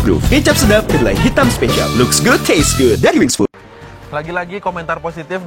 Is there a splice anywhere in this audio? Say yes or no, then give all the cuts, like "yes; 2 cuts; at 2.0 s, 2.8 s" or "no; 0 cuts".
yes; 1 cut; at 4.0 s